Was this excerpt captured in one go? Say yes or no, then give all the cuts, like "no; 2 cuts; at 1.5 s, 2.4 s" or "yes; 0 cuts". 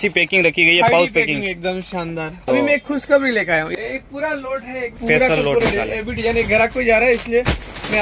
no; 3 cuts; at 2.4 s, 3.7 s, 5.0 s